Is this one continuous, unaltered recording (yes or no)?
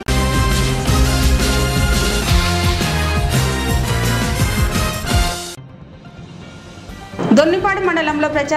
no